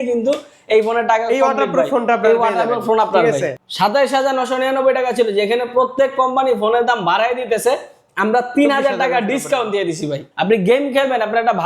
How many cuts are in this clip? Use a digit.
2